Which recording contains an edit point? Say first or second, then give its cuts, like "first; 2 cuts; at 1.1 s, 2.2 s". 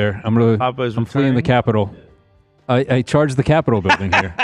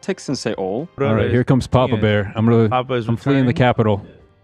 second; 1 cut; at 1.0 s